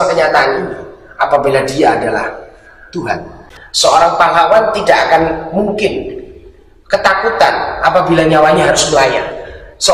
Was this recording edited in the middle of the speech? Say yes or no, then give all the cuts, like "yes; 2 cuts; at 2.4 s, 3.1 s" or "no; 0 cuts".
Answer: yes; 1 cut; at 3.3 s